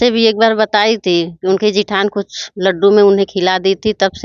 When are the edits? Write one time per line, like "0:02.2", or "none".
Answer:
none